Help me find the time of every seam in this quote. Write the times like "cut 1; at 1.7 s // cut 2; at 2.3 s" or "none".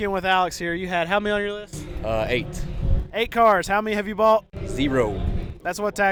none